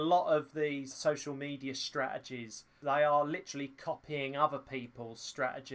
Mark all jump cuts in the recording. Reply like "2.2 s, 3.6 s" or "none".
1.0 s, 2.7 s